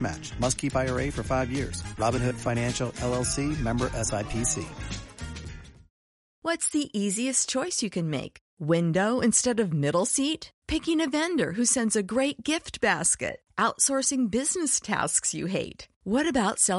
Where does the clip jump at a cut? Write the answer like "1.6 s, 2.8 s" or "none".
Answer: 6.4 s